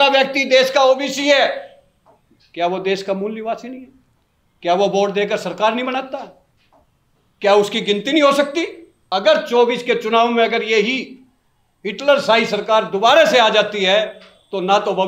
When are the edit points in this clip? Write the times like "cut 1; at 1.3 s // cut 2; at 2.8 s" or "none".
cut 1; at 8.9 s

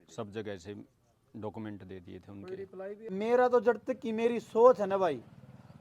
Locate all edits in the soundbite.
cut 1; at 3.1 s

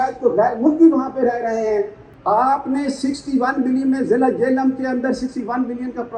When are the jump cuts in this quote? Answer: cut 1; at 2.0 s

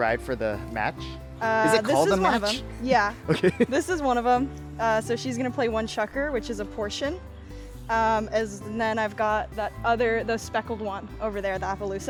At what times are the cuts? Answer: none

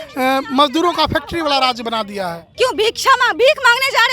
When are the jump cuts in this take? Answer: cut 1; at 2.4 s

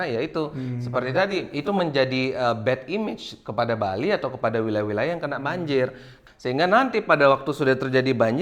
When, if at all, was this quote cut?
cut 1; at 6.1 s

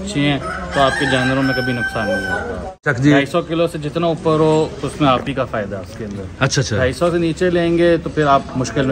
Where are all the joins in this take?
cut 1; at 2.9 s

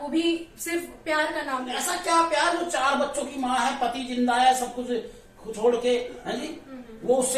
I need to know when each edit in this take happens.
cut 1; at 1.8 s

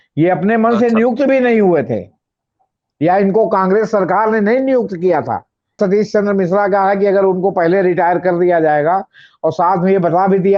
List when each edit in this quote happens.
cut 1; at 5.8 s

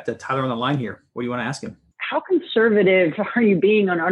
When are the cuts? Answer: cut 1; at 1.8 s

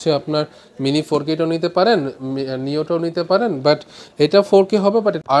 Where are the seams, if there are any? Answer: none

